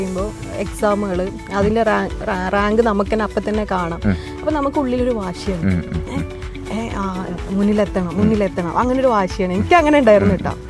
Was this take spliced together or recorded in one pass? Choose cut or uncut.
uncut